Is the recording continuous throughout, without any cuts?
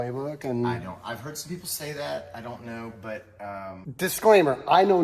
no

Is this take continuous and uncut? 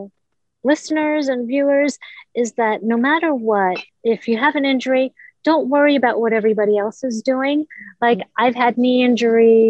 no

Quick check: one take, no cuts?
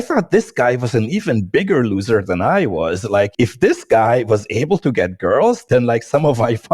no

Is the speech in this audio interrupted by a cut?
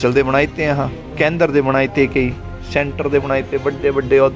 no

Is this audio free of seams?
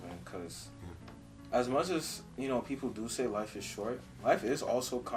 yes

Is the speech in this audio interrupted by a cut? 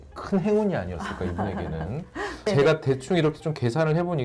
yes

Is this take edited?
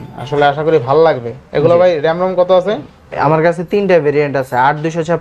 no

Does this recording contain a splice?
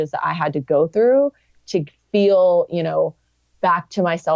no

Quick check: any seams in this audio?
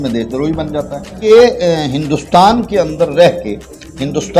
yes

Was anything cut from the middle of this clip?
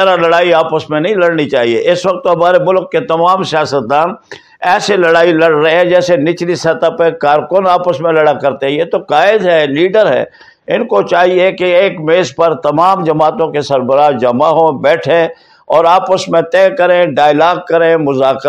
no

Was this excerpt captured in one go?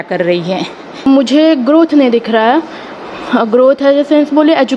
no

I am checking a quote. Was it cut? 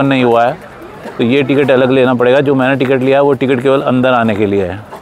no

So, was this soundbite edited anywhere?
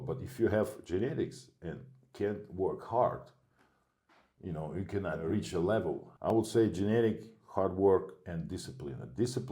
yes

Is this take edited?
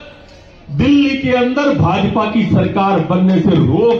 no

